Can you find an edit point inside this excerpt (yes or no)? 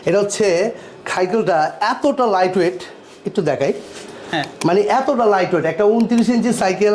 no